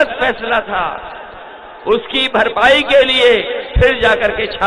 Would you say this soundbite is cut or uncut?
uncut